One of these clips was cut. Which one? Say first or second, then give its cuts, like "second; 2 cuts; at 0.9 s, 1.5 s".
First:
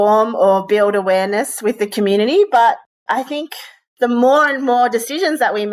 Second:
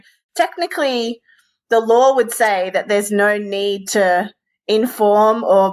first; 1 cut; at 2.9 s